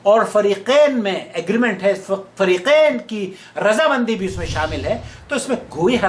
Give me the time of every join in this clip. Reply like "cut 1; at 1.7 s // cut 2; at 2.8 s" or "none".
none